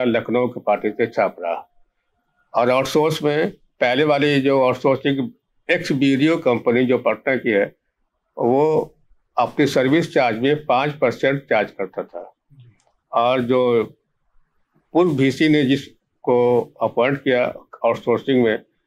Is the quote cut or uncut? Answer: uncut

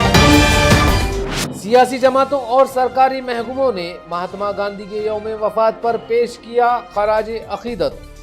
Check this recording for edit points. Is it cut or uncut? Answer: cut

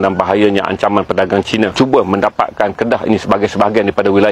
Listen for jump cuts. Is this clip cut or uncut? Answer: cut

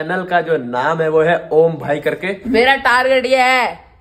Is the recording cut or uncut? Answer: cut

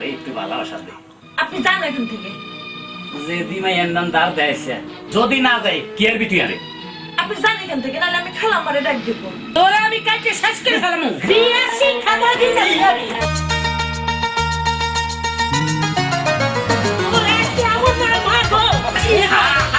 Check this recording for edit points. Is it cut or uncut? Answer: uncut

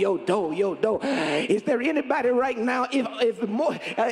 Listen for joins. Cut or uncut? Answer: uncut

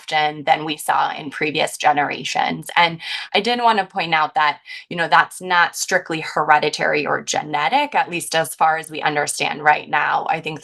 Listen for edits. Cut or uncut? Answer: uncut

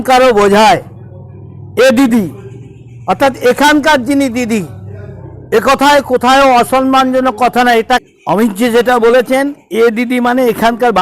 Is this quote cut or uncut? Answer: cut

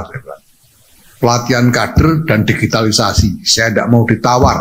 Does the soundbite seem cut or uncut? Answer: uncut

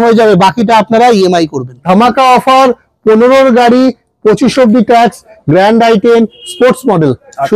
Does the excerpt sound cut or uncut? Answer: cut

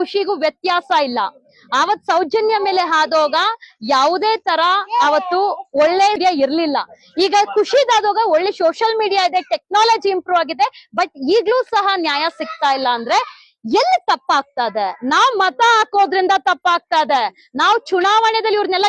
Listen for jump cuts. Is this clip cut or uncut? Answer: uncut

